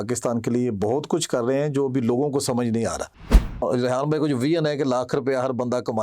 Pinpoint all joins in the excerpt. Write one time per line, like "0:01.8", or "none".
0:03.6